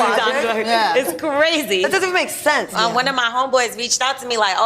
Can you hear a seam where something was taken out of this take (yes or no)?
yes